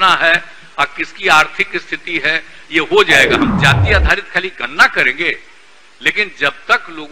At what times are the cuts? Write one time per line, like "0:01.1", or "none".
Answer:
0:03.5